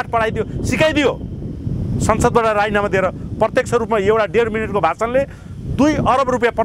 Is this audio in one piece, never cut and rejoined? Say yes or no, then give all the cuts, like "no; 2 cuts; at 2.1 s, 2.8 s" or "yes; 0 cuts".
yes; 0 cuts